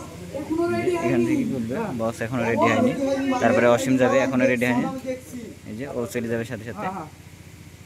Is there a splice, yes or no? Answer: no